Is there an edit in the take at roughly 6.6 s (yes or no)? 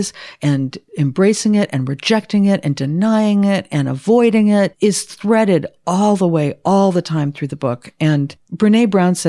no